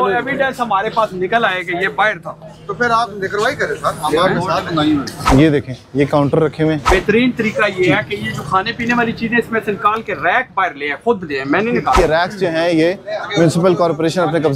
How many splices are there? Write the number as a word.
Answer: three